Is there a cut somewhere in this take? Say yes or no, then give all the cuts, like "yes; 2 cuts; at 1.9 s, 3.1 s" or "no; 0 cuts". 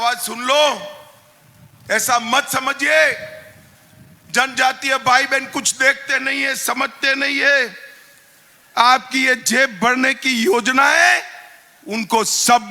no; 0 cuts